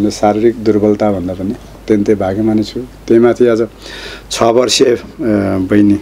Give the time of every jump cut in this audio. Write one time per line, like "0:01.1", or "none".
0:01.8